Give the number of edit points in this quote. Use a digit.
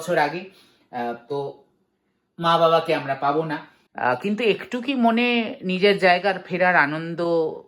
1